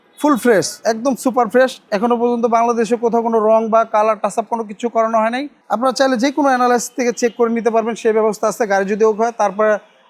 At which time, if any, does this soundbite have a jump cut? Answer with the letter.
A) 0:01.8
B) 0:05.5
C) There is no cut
B